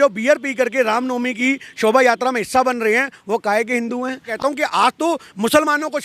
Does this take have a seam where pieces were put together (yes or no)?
yes